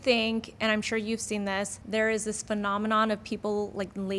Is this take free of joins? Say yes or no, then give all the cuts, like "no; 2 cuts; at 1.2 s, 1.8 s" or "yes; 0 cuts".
no; 1 cut; at 1.8 s